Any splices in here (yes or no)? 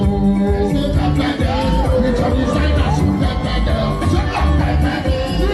no